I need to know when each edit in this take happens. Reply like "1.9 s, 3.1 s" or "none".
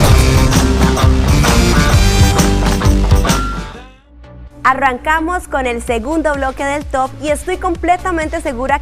none